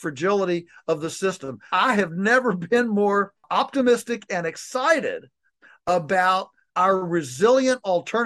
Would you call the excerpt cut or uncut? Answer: cut